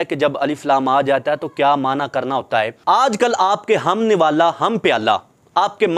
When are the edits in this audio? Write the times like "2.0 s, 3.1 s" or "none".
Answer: 2.8 s